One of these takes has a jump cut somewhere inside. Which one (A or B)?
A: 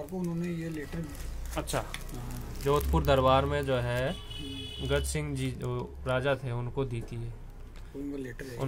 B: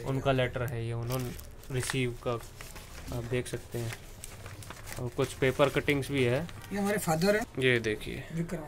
B